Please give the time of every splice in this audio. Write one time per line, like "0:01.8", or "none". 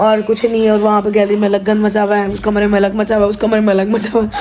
none